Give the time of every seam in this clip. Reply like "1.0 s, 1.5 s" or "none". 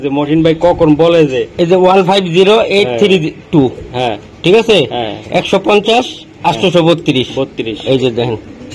none